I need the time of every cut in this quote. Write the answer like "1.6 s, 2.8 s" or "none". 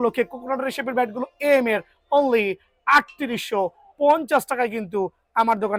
none